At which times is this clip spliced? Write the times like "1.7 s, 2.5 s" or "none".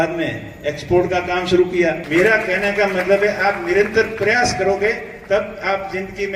2.0 s